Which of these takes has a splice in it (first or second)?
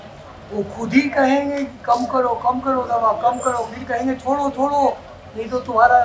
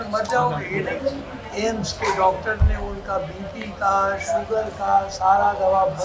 second